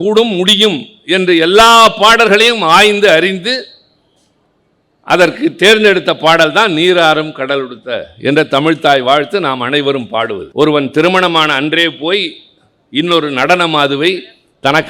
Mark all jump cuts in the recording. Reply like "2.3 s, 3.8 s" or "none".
10.4 s